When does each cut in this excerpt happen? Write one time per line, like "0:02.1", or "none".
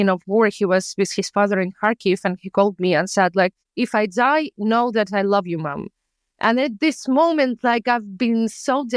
none